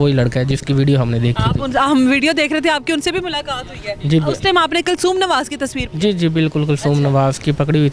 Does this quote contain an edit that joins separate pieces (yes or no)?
yes